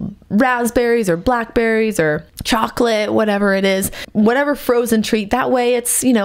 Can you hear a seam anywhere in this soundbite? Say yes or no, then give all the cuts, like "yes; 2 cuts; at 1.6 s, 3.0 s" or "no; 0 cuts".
yes; 2 cuts; at 2.3 s, 4.0 s